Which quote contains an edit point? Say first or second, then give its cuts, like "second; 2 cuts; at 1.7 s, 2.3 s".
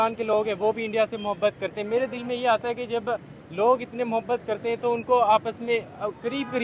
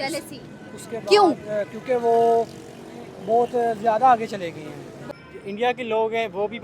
second; 1 cut; at 5.0 s